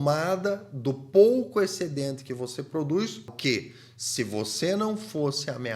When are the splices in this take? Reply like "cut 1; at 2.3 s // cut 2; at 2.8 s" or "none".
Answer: cut 1; at 3.3 s